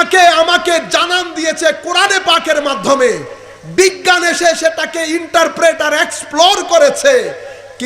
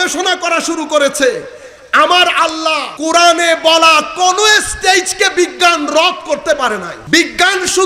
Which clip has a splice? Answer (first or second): second